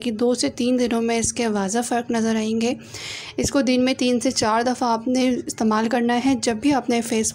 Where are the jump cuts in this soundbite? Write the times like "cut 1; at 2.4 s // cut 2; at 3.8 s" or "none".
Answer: none